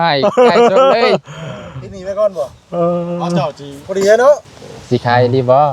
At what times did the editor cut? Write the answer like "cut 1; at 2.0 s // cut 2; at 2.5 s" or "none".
cut 1; at 4.4 s